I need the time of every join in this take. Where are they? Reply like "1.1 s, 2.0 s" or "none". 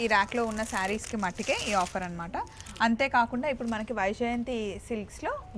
none